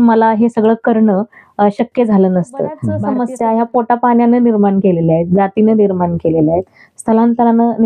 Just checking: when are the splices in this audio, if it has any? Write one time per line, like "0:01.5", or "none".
0:02.9

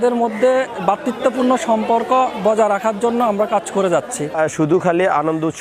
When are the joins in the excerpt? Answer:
0:04.3

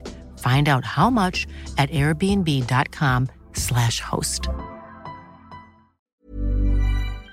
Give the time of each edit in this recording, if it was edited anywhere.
0:06.2

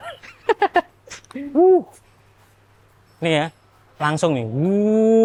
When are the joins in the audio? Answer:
none

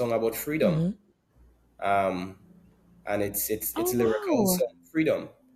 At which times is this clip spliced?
none

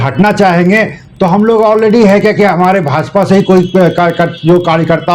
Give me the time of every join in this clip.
none

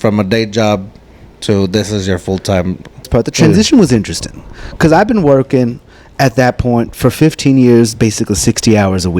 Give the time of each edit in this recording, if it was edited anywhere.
0:03.1

